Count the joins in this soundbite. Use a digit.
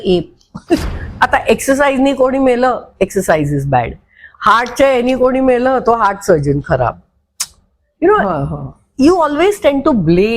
1